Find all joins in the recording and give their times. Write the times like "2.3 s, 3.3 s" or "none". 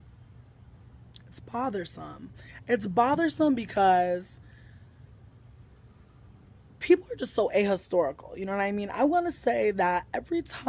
3.2 s